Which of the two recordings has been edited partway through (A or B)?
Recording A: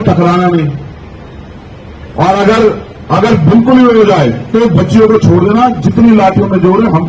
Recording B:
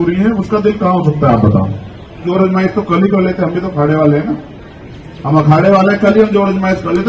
B